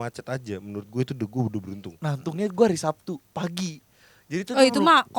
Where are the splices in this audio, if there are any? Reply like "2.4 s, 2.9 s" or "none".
none